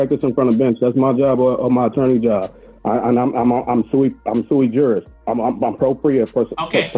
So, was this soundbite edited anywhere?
yes; 1 cut; at 5.1 s

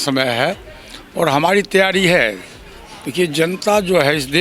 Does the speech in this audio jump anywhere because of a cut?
no; 0 cuts

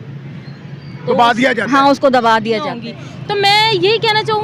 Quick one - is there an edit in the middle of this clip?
yes; 1 cut; at 2.7 s

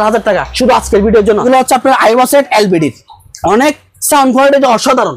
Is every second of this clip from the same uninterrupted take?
no; 1 cut; at 1.4 s

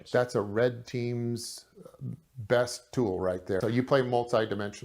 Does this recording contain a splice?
yes; 1 cut; at 3.6 s

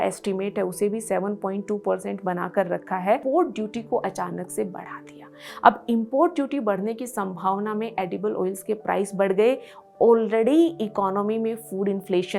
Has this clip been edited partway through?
yes; 1 cut; at 3.2 s

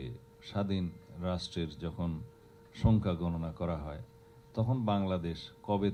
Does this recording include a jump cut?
no; 0 cuts

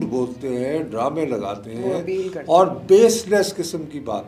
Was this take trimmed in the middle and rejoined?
no; 0 cuts

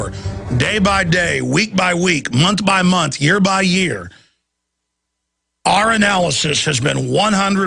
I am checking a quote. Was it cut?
no; 0 cuts

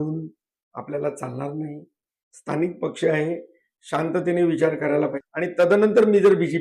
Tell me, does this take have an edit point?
yes; 1 cut; at 5.2 s

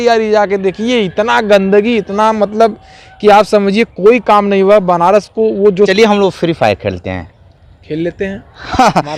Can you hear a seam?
yes; 1 cut; at 5.9 s

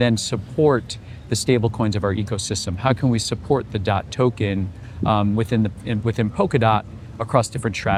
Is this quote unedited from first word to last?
yes; 0 cuts

